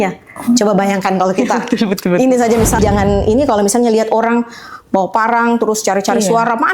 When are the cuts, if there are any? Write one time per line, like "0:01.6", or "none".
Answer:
0:02.8